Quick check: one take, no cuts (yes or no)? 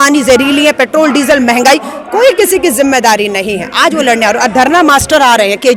yes